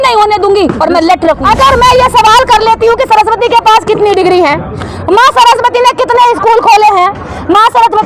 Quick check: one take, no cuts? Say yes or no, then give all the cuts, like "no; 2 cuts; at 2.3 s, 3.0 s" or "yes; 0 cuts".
no; 1 cut; at 1.4 s